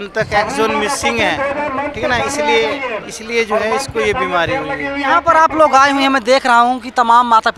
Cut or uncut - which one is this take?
uncut